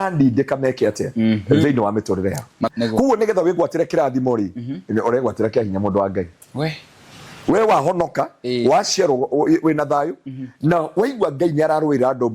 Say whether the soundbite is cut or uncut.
cut